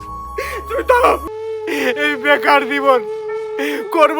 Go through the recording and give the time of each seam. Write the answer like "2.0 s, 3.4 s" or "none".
1.2 s